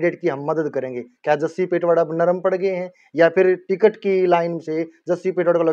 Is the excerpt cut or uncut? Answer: uncut